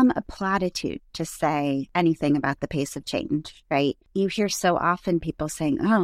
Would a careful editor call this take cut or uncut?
cut